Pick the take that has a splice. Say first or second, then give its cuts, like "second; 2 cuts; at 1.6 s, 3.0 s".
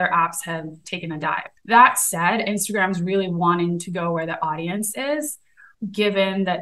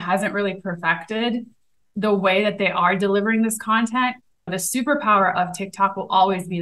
first; 2 cuts; at 1.5 s, 5.7 s